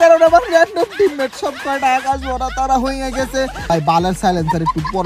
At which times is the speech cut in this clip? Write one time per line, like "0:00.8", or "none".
0:03.6